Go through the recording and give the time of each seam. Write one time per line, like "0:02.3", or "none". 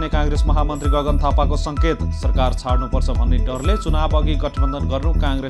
none